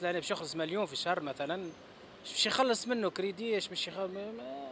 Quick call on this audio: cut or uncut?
uncut